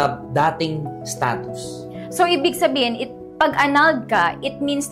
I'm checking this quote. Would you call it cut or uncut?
uncut